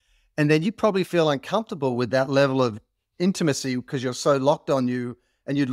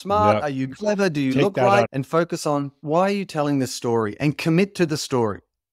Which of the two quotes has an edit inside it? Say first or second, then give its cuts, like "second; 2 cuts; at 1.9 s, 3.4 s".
second; 1 cut; at 1.9 s